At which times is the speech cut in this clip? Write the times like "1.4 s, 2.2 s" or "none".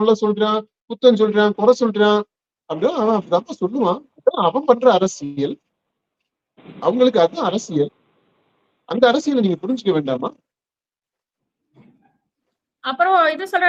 none